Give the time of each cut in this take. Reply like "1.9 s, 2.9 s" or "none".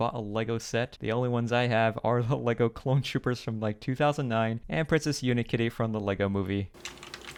none